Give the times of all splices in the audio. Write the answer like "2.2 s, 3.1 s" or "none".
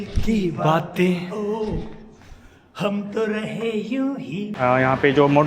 4.5 s